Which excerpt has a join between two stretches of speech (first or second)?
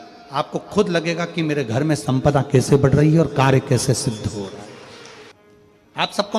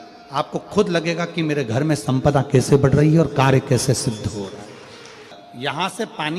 first